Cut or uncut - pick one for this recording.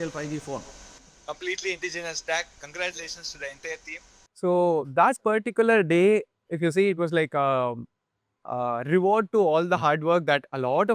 uncut